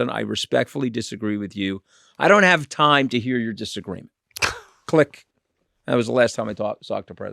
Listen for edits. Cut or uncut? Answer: uncut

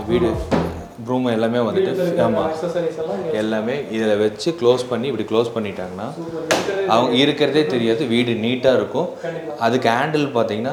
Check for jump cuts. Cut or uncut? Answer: uncut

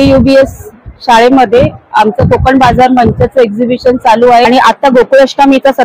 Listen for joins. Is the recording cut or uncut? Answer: cut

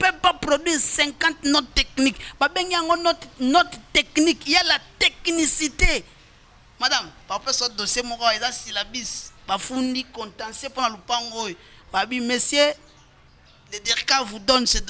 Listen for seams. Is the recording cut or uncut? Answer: uncut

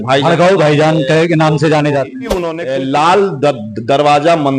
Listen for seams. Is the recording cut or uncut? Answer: cut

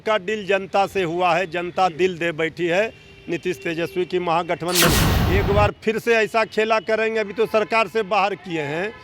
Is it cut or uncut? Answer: cut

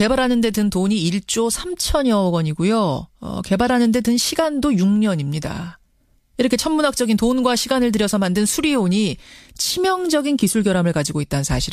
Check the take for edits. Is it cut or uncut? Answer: uncut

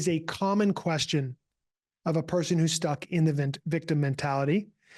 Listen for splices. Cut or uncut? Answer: uncut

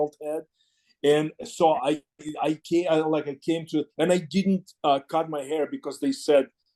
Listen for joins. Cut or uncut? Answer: uncut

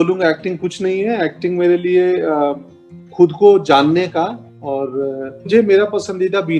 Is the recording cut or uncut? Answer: cut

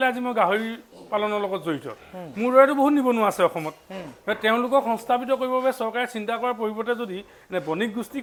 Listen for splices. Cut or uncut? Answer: uncut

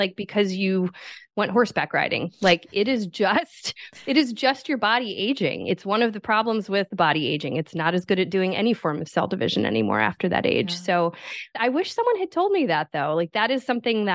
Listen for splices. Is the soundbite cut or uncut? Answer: cut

